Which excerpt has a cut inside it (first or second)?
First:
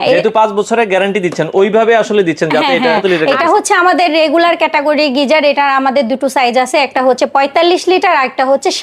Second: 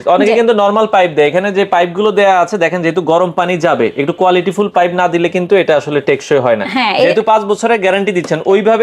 first